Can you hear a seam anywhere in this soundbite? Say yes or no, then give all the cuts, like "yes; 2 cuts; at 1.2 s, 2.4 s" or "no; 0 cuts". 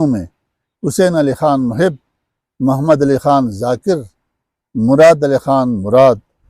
no; 0 cuts